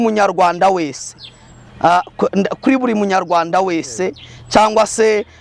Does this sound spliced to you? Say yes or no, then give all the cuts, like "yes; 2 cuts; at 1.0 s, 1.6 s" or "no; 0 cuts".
no; 0 cuts